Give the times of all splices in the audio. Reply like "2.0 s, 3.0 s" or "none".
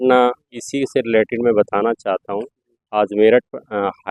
none